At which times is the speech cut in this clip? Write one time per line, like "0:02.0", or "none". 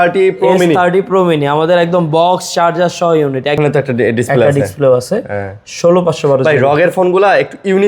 0:03.6